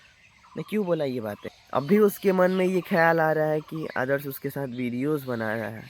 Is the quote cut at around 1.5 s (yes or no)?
yes